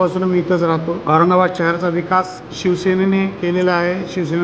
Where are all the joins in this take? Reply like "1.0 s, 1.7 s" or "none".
1.0 s